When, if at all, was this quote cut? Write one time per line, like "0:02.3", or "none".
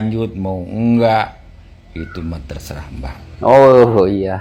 0:03.2